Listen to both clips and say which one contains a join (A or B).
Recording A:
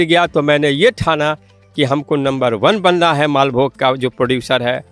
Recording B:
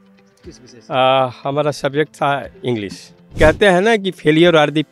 B